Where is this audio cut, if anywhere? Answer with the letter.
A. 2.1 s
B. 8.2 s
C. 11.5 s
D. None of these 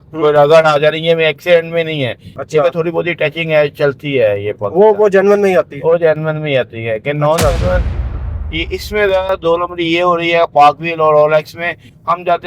B